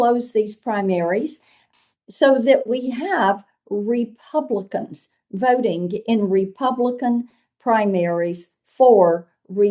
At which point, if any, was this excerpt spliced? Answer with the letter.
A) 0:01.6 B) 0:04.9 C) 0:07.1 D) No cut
A